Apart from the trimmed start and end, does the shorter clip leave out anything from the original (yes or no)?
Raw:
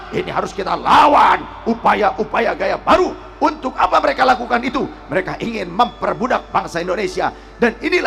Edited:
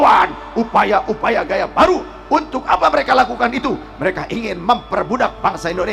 no